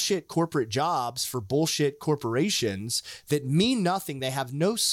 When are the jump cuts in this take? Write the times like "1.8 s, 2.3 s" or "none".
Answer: none